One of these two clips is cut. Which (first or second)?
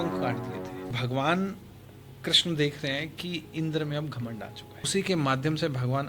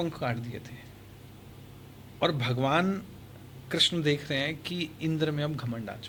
first